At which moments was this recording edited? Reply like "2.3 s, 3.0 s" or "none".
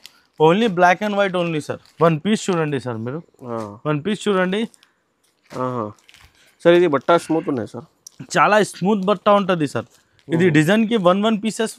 1.8 s

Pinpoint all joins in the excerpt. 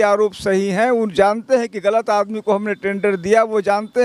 none

